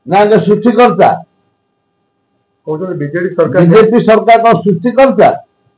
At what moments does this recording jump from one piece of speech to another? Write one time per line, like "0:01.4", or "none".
none

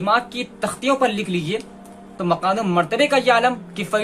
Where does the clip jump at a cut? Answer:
0:02.1

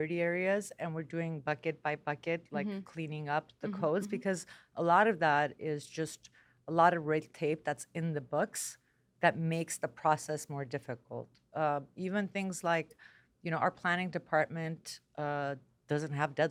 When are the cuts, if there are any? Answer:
none

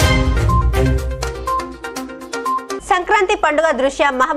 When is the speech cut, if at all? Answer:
0:02.8

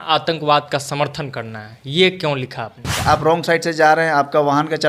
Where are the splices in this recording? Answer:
0:02.9

